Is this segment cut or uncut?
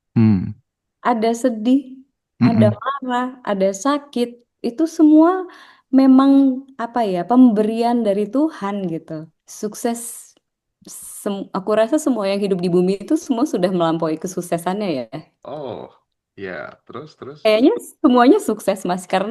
cut